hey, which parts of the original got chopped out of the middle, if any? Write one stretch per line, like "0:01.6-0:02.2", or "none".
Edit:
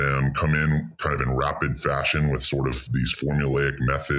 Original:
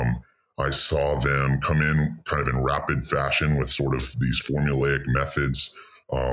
none